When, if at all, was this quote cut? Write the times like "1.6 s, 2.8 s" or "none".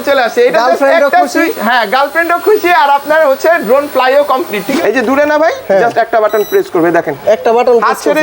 4.6 s